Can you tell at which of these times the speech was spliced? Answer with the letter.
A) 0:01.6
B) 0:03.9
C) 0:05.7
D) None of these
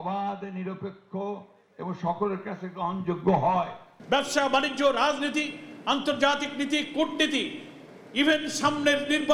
B